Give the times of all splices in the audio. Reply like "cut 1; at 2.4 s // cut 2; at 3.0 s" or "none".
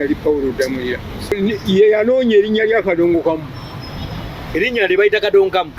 cut 1; at 1.3 s